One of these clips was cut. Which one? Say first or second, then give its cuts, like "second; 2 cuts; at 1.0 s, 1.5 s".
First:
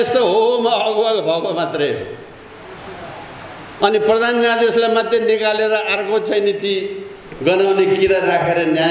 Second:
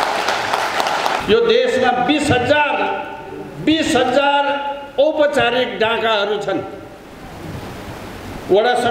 second; 1 cut; at 1.2 s